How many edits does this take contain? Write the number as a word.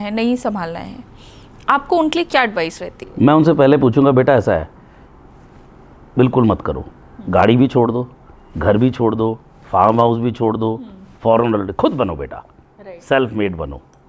zero